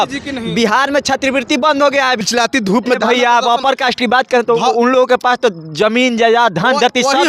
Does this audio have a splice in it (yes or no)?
yes